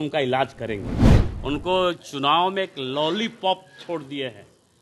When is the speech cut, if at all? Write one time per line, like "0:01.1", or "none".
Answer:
0:01.1